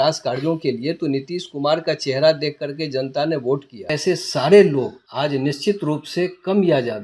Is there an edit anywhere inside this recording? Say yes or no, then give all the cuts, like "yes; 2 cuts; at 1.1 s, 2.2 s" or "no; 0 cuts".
yes; 2 cuts; at 4.0 s, 5.0 s